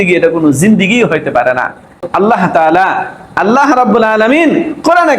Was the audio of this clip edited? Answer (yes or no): yes